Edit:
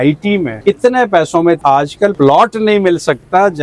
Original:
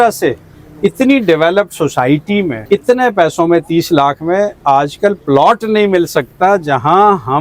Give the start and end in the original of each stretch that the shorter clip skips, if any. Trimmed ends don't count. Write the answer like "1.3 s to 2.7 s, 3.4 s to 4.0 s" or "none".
3.8 s to 4.9 s